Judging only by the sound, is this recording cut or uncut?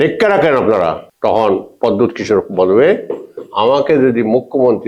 cut